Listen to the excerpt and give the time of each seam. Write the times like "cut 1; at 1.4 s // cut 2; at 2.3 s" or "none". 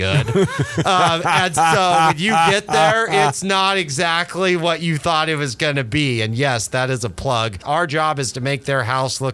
cut 1; at 7.6 s